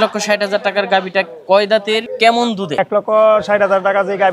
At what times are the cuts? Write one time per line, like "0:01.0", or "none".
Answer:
0:02.1
0:02.8